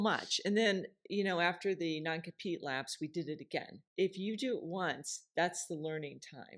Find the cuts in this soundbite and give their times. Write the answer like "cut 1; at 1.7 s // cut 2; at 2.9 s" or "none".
cut 1; at 3.8 s